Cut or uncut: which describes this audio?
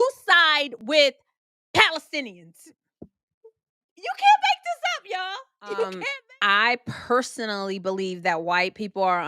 cut